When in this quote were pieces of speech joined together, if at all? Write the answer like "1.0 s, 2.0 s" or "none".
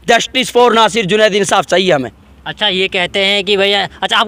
none